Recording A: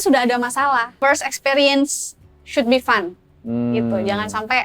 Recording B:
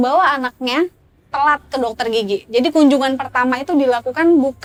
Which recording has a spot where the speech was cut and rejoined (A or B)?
A